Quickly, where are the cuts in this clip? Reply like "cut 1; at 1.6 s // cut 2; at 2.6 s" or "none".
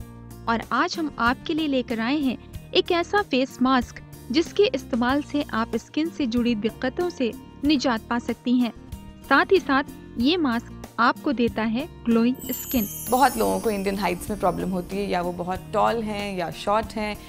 cut 1; at 13.0 s

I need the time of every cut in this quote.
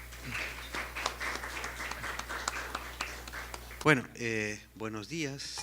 cut 1; at 2.4 s

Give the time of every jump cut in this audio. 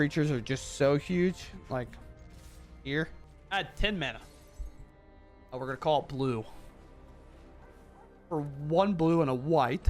cut 1; at 3.3 s

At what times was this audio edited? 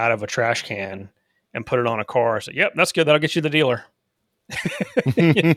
none

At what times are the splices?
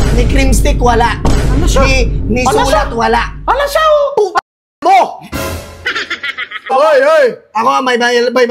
cut 1; at 6.7 s

